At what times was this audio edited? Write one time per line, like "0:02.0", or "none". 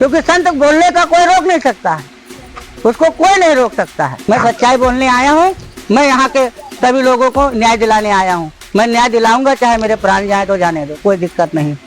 0:04.2